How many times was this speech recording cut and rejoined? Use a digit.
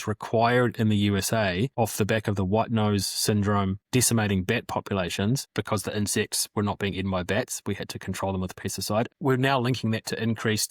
1